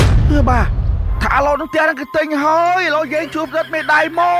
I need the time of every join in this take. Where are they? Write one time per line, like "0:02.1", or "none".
0:01.1